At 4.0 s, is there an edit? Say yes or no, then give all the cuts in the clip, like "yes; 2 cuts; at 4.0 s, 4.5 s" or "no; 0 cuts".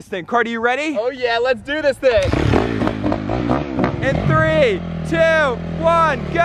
yes; 1 cut; at 4.0 s